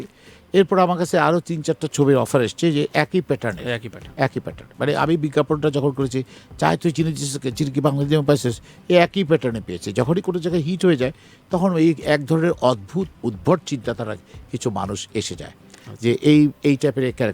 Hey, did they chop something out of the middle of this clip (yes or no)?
yes